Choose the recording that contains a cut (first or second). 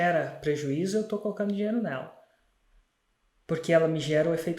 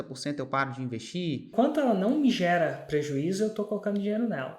second